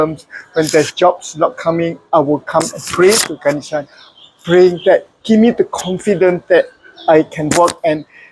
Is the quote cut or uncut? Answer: uncut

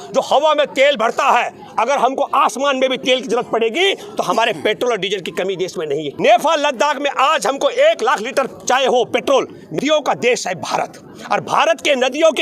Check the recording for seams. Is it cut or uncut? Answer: cut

